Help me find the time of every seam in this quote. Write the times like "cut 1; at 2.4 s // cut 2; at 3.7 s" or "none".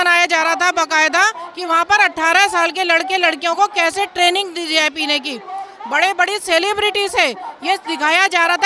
none